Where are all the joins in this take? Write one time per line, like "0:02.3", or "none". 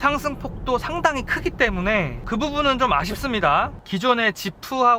0:03.8